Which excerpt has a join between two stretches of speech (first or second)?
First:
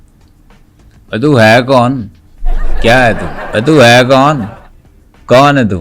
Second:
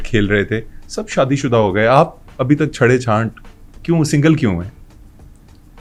first